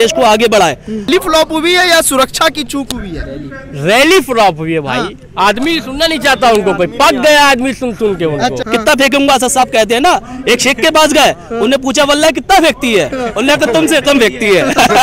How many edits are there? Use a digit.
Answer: 2